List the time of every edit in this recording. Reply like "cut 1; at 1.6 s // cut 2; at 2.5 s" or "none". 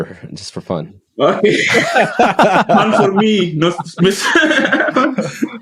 none